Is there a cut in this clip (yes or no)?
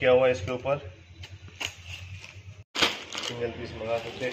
yes